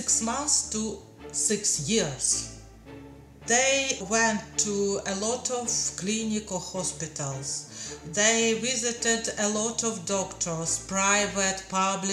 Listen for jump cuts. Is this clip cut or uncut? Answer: uncut